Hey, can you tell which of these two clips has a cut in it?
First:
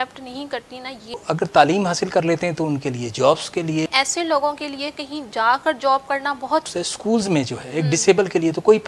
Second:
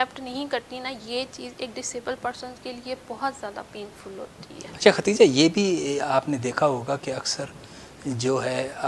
first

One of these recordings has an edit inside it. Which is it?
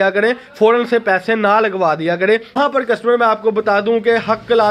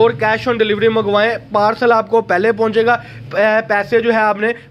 first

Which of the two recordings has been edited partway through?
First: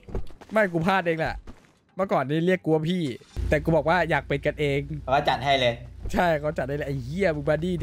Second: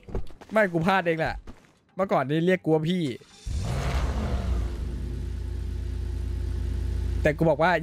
first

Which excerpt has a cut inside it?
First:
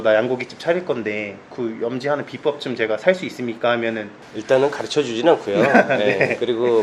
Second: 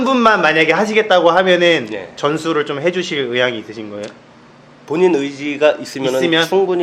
first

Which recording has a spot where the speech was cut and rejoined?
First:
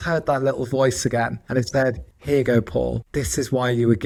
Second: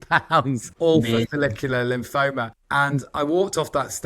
second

